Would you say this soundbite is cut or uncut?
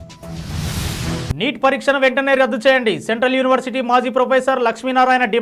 cut